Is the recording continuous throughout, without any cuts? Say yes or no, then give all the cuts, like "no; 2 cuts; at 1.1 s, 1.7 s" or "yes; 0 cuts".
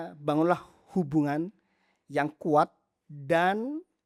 yes; 0 cuts